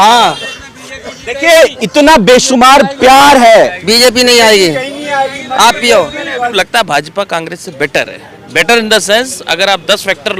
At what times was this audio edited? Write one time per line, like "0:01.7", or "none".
0:03.8
0:06.4